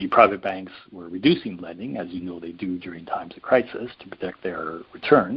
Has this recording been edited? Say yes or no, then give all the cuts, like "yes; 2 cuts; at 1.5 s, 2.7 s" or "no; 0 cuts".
no; 0 cuts